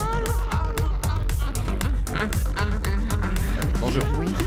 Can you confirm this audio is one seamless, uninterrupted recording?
yes; 0 cuts

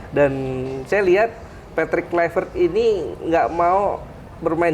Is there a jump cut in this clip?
no; 0 cuts

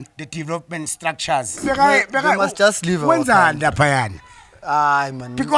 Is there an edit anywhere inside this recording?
yes; 1 cut; at 1.6 s

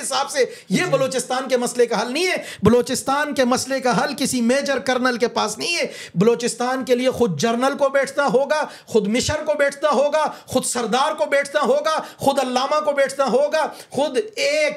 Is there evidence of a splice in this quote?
no; 0 cuts

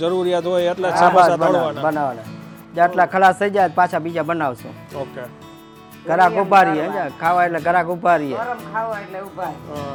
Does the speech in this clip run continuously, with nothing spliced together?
yes; 0 cuts

